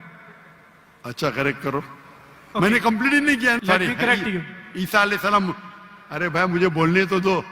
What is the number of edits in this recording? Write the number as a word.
one